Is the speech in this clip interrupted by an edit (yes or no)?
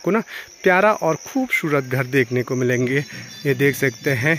no